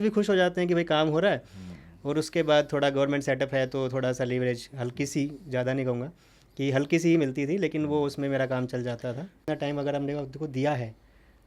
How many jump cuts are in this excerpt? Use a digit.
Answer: 1